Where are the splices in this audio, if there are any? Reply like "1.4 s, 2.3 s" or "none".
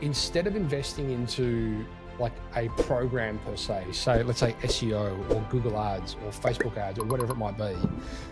none